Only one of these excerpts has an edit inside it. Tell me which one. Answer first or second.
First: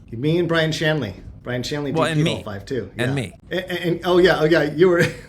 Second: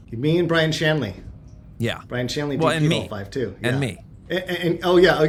first